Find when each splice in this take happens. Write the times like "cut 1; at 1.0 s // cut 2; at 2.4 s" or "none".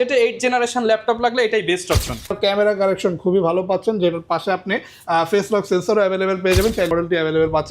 cut 1; at 2.3 s // cut 2; at 6.9 s

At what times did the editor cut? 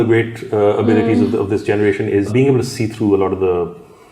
cut 1; at 2.3 s

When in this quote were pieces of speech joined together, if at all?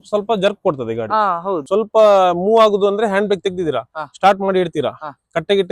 cut 1; at 1.6 s

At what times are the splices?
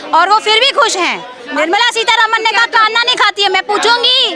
cut 1; at 1.4 s

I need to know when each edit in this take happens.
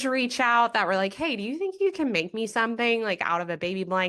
none

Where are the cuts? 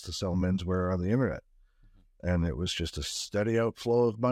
none

